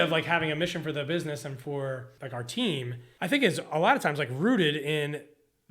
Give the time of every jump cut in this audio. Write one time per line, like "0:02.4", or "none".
0:02.1
0:03.0